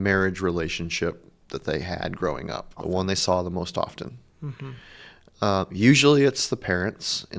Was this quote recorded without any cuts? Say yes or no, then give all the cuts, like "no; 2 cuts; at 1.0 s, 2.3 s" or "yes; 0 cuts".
no; 1 cut; at 2.7 s